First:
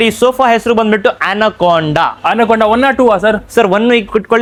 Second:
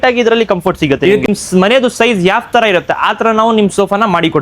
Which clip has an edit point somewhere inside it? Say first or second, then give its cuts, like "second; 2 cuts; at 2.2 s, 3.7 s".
second; 1 cut; at 1.2 s